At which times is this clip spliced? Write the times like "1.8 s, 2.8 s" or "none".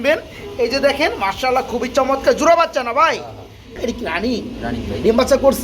3.8 s